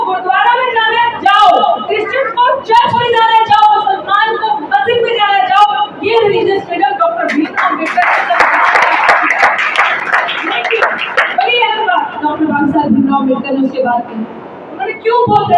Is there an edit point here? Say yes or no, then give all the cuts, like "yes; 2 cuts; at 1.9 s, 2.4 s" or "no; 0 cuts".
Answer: no; 0 cuts